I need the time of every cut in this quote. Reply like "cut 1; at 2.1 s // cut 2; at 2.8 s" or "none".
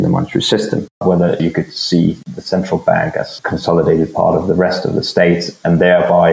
cut 1; at 1.0 s // cut 2; at 2.3 s // cut 3; at 3.4 s